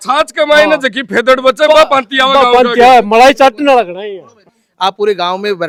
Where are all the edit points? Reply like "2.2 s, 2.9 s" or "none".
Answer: none